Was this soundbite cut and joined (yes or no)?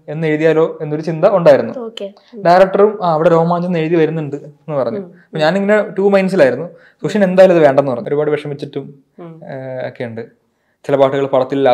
yes